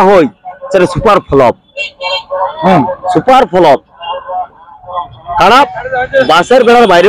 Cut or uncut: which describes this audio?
uncut